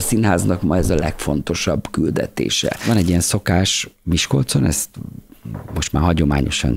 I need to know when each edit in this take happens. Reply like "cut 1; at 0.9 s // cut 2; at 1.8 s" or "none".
cut 1; at 2.8 s